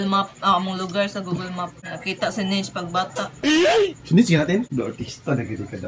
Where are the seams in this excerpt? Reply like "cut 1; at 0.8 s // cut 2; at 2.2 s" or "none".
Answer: cut 1; at 1.9 s // cut 2; at 4.7 s